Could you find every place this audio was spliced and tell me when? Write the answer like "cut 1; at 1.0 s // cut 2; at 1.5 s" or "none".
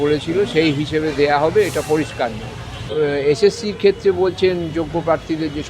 cut 1; at 2.8 s